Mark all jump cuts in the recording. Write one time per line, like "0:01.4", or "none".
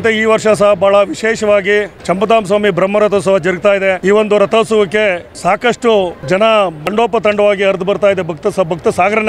0:01.9
0:04.0
0:05.3
0:06.2
0:06.8